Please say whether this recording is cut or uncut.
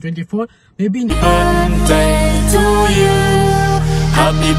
cut